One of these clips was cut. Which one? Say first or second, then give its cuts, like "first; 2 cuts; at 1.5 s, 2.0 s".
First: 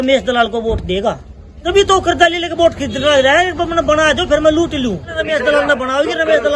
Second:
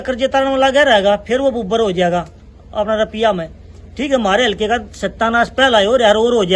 first; 2 cuts; at 1.6 s, 5.1 s